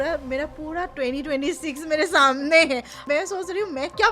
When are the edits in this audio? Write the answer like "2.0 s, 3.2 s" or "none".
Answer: 2.9 s